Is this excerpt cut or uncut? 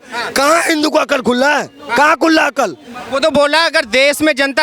uncut